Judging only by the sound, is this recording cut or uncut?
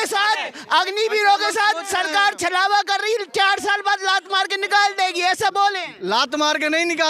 uncut